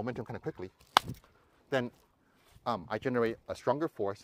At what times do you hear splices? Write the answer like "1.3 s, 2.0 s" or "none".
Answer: none